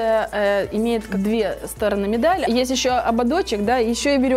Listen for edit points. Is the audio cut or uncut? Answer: cut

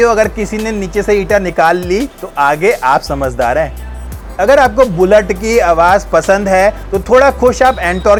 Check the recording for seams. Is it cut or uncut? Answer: uncut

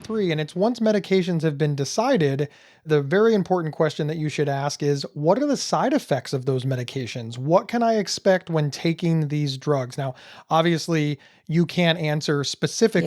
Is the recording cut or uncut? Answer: cut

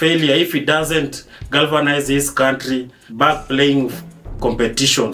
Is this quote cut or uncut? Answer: uncut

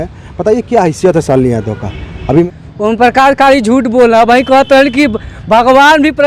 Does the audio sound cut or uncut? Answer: cut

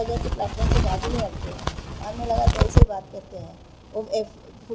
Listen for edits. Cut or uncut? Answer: uncut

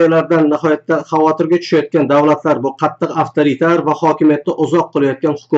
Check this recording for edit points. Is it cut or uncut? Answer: uncut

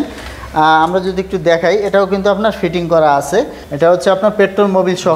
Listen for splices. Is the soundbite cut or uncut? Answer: cut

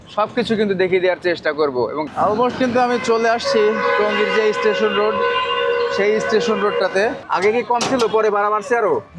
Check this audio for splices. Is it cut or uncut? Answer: cut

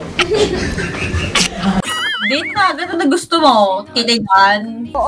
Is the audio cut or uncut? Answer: uncut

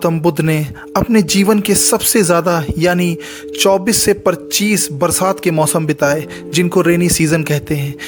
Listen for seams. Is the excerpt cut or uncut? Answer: uncut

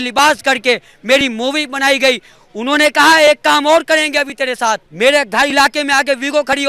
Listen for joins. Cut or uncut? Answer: cut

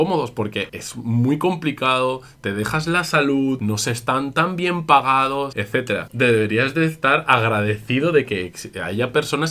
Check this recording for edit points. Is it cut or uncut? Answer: cut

